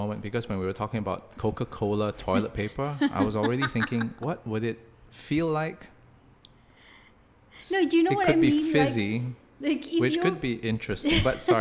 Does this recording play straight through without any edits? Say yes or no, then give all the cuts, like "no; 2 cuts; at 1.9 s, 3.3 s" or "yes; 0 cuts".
yes; 0 cuts